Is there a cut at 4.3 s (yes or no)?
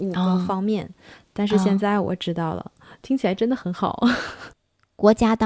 yes